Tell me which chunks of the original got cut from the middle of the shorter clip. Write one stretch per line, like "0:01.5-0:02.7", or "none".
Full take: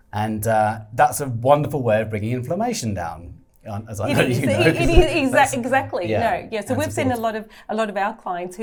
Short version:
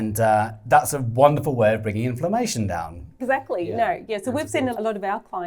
0:03.4-0:05.6
0:07.2-0:07.7